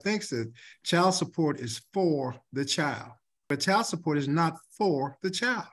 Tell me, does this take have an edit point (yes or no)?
no